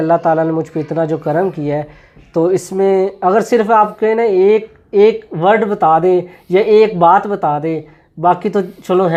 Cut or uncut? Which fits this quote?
uncut